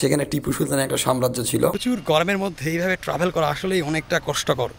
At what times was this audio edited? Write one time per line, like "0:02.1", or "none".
0:01.8

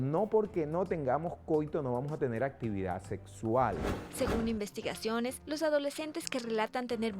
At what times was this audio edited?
0:04.0

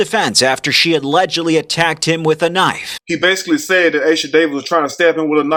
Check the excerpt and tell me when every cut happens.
none

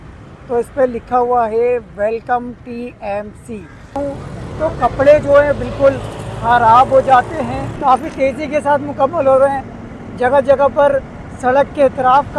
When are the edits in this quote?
0:04.0
0:07.6

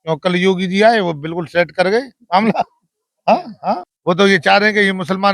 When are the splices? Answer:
0:03.9

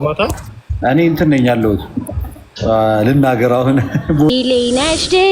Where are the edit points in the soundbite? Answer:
0:04.3

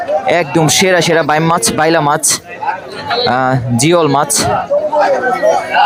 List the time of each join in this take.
none

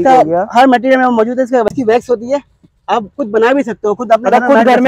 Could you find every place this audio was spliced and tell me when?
0:01.7

